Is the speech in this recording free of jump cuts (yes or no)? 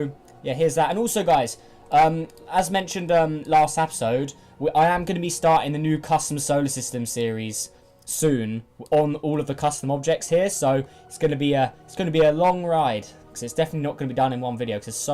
no